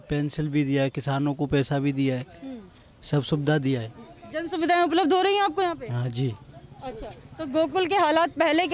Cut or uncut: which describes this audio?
uncut